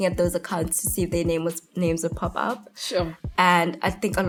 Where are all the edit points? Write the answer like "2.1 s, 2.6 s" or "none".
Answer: none